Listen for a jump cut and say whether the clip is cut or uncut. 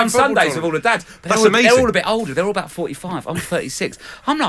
uncut